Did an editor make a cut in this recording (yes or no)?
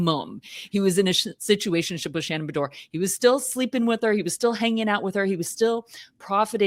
no